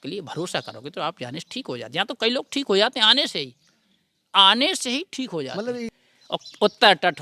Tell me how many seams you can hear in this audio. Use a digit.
1